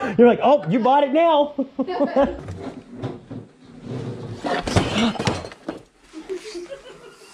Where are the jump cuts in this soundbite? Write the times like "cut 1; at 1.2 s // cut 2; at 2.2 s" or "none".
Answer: cut 1; at 2.4 s